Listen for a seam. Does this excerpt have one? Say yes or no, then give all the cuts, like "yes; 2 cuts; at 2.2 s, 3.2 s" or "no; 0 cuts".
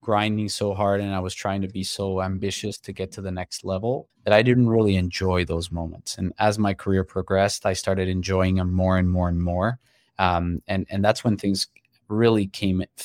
yes; 1 cut; at 4.1 s